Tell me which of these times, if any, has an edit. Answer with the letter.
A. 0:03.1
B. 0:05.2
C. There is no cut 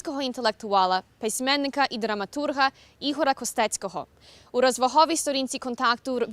A